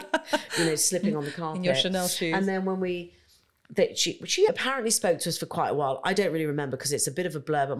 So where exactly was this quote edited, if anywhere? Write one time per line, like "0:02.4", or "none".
0:04.5